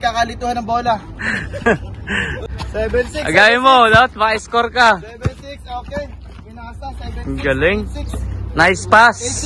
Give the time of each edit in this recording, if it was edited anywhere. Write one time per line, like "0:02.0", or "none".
0:02.3